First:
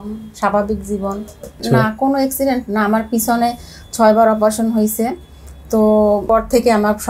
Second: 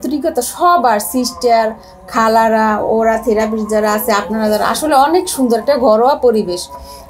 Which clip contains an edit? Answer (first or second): first